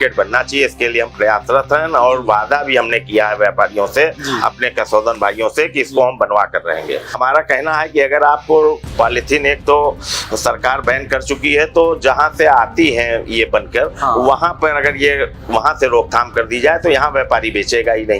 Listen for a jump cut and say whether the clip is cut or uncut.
cut